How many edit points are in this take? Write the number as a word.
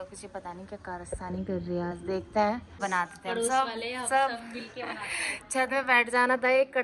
one